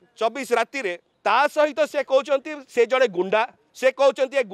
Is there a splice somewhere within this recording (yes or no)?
yes